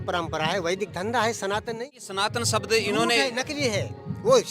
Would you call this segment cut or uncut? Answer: cut